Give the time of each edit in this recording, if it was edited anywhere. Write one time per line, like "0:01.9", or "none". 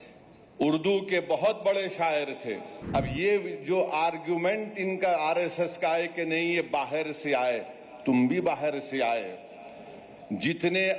0:02.7